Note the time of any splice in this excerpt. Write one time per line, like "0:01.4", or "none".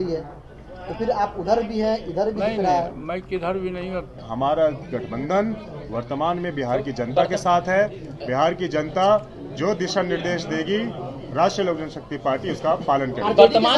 0:04.2

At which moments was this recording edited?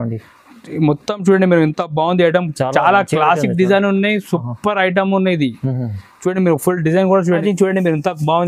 0:07.4

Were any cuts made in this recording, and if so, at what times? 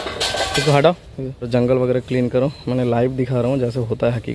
0:01.5

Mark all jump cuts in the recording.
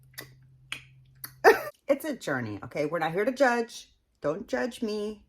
0:01.7

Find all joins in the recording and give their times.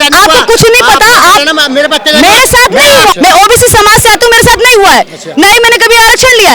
0:03.1

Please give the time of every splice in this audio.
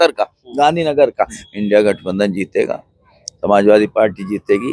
0:01.4

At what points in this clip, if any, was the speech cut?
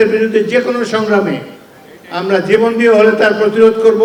none

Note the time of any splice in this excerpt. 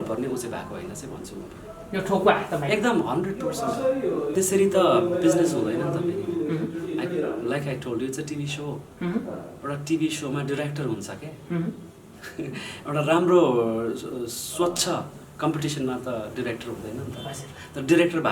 0:04.3

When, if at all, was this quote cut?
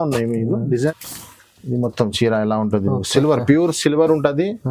0:01.0

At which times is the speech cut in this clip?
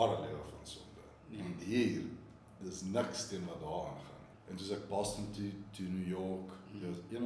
0:04.3

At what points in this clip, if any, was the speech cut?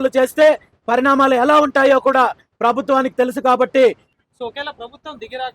0:04.1

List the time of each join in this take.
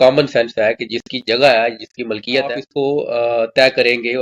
0:02.6

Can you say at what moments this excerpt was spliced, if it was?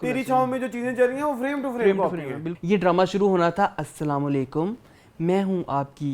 0:02.5

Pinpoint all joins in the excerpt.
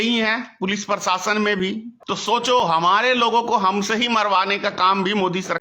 0:01.9

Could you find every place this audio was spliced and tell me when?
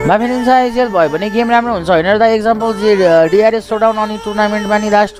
none

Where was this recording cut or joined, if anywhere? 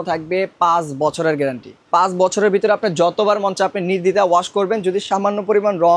none

